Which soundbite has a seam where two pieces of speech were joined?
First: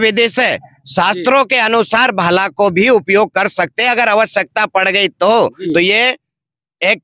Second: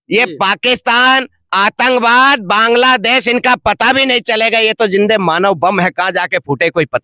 first; 1 cut; at 5.6 s

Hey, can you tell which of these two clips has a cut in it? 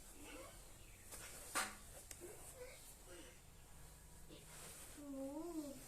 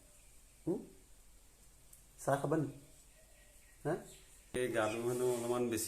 second; 1 cut; at 4.6 s

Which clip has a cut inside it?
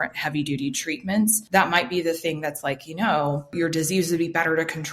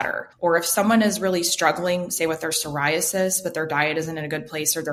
first; 2 cuts; at 1.4 s, 3.5 s

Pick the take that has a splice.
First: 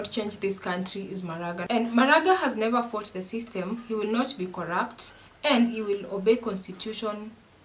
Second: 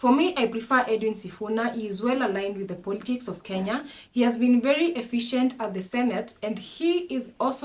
first; 1 cut; at 1.6 s

